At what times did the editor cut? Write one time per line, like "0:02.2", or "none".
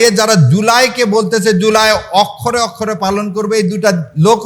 none